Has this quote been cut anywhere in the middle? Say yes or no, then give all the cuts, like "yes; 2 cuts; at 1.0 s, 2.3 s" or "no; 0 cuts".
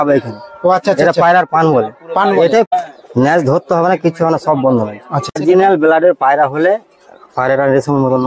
yes; 2 cuts; at 2.7 s, 5.4 s